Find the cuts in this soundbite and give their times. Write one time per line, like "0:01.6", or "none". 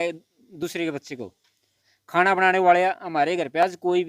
0:01.8